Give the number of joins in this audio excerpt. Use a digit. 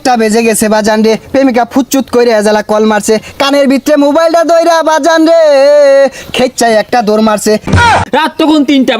1